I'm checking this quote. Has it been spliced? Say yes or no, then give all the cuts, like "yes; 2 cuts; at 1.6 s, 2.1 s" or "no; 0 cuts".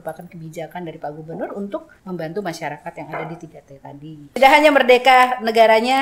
yes; 2 cuts; at 1.9 s, 4.3 s